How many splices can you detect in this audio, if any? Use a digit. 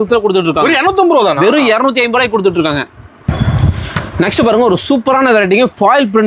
0